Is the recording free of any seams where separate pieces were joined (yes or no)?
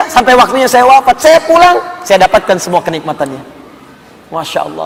yes